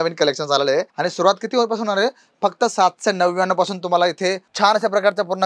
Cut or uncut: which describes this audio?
cut